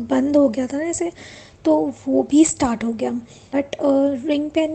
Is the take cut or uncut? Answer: cut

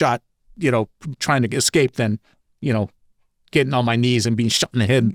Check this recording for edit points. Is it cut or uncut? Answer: uncut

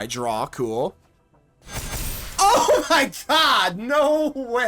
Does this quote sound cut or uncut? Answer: uncut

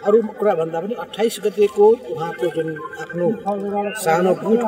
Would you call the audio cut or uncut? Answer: uncut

